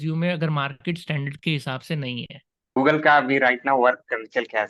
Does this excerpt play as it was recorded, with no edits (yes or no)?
no